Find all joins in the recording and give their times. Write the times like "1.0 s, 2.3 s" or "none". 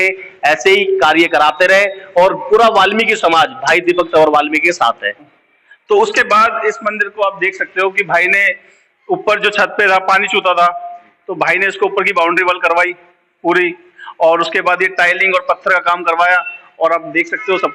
5.4 s